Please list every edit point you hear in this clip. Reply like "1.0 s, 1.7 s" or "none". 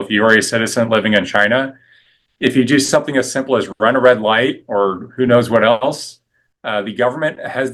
none